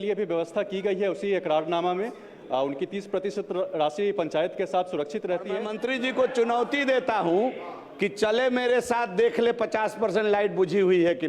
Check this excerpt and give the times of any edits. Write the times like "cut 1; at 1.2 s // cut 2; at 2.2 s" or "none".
cut 1; at 5.8 s